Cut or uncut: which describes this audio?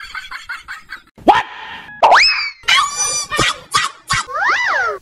cut